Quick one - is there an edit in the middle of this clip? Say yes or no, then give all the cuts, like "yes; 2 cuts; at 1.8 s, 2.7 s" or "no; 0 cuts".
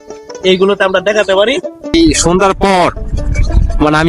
yes; 1 cut; at 1.9 s